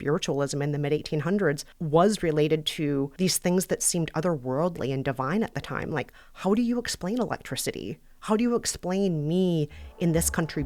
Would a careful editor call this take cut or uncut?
cut